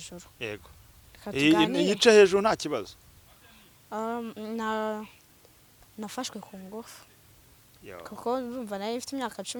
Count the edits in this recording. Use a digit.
0